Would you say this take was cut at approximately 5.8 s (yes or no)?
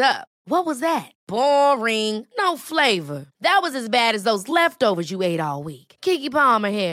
no